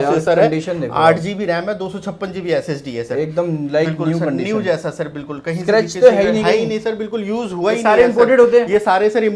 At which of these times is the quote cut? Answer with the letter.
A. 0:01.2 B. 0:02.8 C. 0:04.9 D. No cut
D